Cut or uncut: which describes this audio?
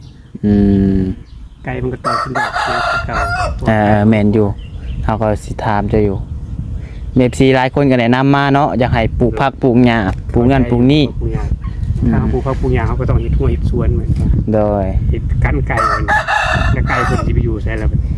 uncut